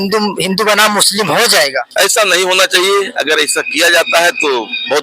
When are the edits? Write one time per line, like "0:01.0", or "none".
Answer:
0:01.9